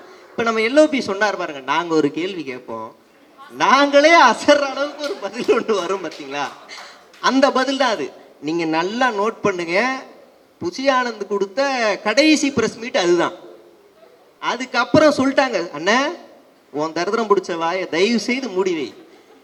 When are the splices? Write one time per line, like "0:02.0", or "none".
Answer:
none